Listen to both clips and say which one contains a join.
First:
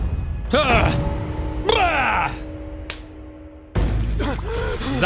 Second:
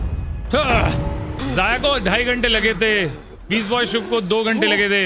second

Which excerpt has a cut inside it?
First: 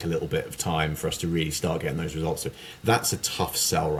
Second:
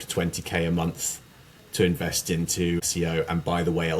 second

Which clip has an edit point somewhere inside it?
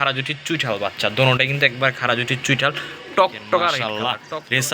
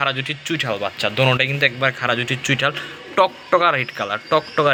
first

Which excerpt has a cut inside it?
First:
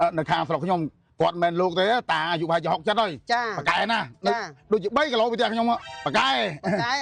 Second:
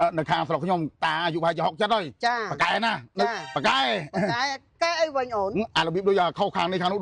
second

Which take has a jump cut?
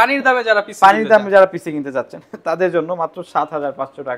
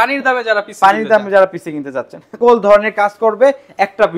second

